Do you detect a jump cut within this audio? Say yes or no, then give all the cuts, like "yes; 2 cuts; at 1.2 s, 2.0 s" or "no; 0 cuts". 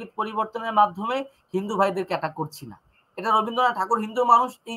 no; 0 cuts